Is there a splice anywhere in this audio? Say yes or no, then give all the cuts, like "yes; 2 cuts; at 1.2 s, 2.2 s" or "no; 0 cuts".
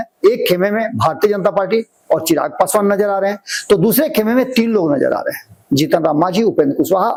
no; 0 cuts